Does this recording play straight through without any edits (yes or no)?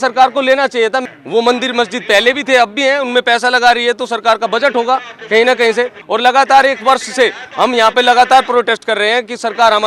no